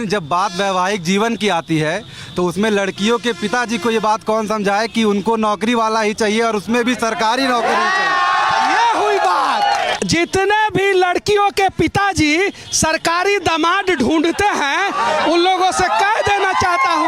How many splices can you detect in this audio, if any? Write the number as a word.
zero